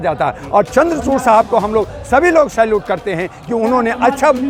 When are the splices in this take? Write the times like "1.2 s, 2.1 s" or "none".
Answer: none